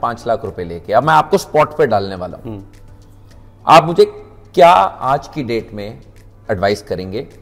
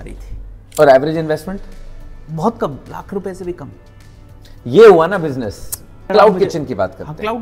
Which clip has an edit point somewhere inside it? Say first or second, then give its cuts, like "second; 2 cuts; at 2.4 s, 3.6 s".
second; 1 cut; at 6.0 s